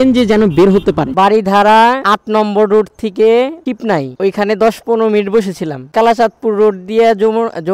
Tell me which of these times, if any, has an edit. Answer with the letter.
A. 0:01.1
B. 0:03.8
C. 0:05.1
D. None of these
A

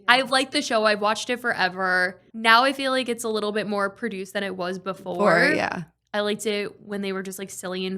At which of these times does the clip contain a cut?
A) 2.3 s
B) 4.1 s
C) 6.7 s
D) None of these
A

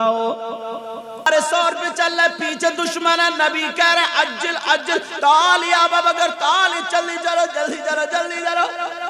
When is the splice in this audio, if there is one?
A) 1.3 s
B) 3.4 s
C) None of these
A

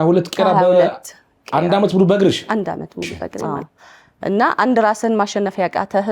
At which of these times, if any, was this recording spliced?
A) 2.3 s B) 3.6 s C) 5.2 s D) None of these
B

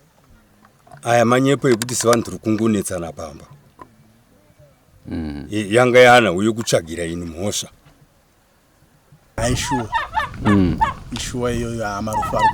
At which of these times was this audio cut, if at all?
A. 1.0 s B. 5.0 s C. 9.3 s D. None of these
C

